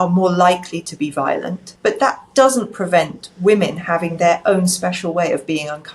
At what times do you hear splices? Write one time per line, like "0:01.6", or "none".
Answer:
0:01.6